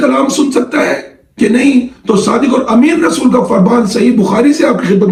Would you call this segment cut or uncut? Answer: uncut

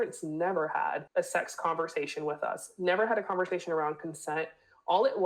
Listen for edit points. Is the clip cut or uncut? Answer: cut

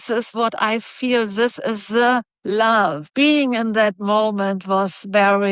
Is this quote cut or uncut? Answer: cut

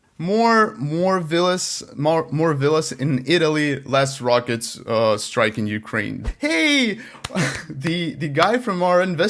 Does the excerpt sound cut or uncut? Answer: cut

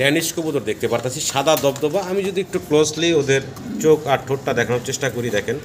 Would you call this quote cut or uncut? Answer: uncut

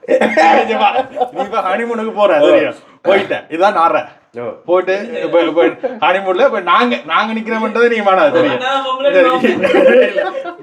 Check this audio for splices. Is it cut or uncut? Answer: uncut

